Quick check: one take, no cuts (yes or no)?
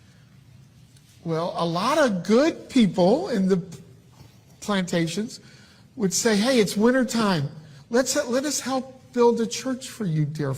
no